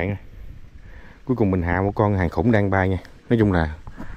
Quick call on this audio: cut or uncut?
uncut